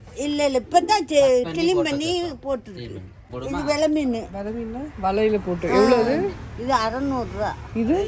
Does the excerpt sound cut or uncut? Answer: cut